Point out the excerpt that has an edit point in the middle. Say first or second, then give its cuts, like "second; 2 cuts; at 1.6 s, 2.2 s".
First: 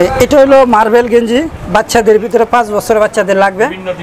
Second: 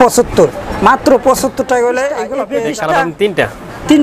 second; 1 cut; at 2.4 s